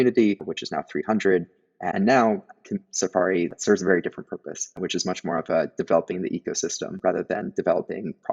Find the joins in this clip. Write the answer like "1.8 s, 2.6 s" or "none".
1.8 s